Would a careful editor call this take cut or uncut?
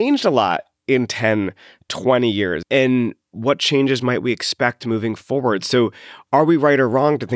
cut